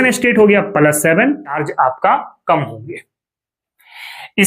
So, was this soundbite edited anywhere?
yes; 1 cut; at 1.6 s

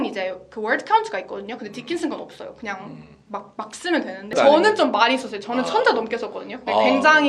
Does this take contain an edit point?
yes; 1 cut; at 4.3 s

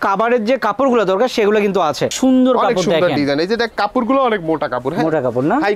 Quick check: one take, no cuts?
no; 1 cut; at 2.1 s

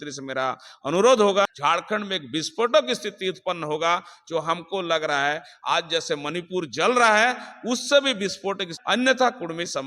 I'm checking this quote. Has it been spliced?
yes; 2 cuts; at 1.5 s, 8.7 s

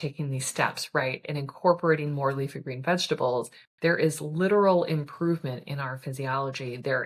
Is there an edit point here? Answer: no; 0 cuts

